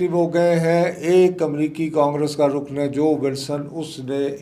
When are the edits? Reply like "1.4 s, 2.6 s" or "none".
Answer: none